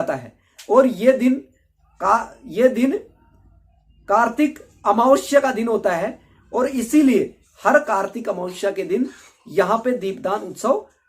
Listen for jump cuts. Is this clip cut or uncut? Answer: uncut